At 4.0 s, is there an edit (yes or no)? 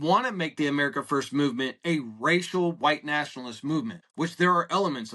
yes